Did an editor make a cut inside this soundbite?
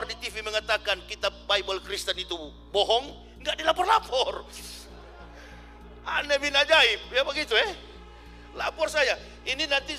no; 0 cuts

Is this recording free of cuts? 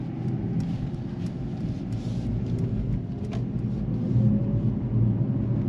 yes; 0 cuts

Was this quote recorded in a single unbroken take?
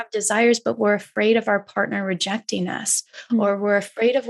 yes; 0 cuts

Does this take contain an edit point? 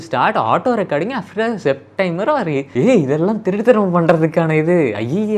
no; 0 cuts

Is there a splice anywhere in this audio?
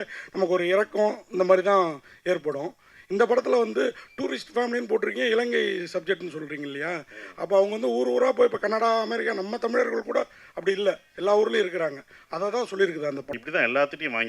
yes; 1 cut; at 13.3 s

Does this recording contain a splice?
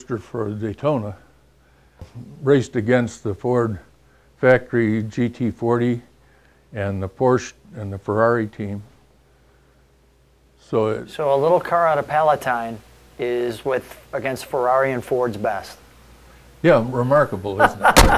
no; 0 cuts

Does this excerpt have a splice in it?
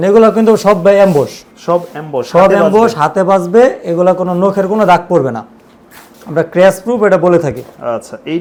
no; 0 cuts

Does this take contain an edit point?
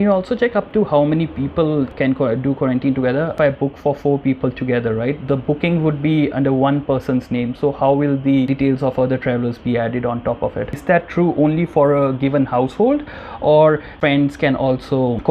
yes; 4 cuts; at 3.3 s, 8.5 s, 10.8 s, 13.9 s

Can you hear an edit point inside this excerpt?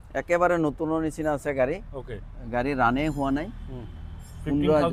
no; 0 cuts

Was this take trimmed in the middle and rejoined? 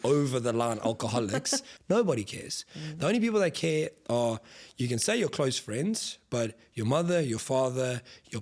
yes; 1 cut; at 1.7 s

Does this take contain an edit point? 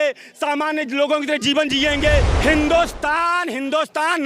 yes; 1 cut; at 2.3 s

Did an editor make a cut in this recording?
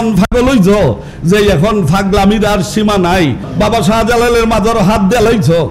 yes; 1 cut; at 3.5 s

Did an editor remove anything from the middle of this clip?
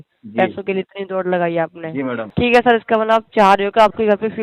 yes; 1 cut; at 2.3 s

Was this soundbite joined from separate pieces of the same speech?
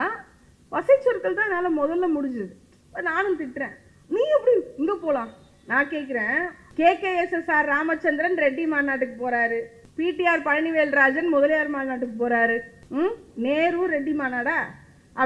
yes; 3 cuts; at 6.6 s, 9.8 s, 12.8 s

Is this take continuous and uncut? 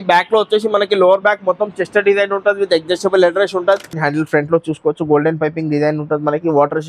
no; 1 cut; at 3.9 s

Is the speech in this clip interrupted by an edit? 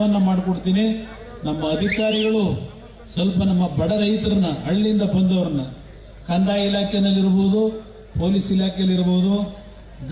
no; 0 cuts

